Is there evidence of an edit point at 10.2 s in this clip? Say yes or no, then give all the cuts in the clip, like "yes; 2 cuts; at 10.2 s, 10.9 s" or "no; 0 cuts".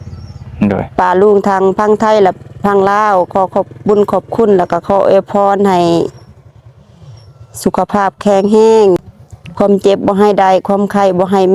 no; 1 cut; at 9.0 s